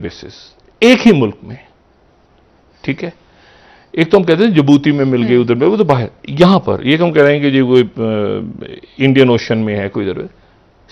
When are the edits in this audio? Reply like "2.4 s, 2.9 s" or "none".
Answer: none